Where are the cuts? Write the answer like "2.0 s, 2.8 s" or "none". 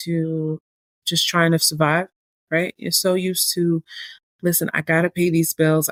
none